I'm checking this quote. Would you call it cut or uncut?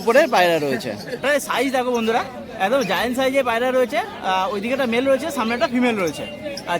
cut